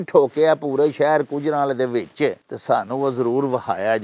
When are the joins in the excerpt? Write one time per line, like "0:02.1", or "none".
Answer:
0:02.5